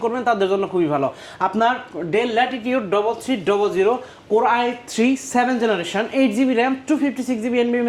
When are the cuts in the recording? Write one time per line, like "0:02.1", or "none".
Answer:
none